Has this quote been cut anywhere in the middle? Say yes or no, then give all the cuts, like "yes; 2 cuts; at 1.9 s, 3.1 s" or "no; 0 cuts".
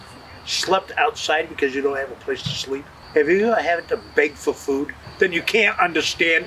yes; 2 cuts; at 3.0 s, 5.1 s